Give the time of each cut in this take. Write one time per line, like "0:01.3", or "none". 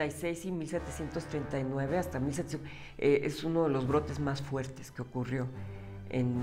none